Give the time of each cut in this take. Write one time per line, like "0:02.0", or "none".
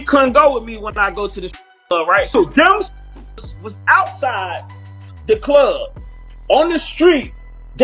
0:02.3